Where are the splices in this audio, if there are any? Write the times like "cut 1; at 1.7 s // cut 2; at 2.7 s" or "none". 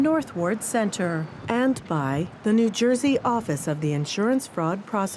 cut 1; at 2.3 s